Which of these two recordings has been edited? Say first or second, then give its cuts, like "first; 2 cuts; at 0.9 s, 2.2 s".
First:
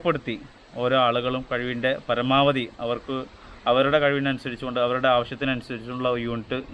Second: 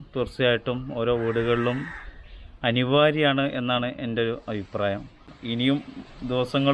second; 1 cut; at 5.3 s